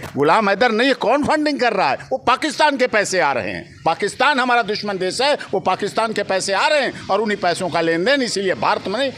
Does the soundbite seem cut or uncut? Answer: uncut